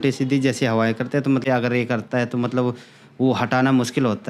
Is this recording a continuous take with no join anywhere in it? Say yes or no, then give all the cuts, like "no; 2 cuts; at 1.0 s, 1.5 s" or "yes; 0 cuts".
yes; 0 cuts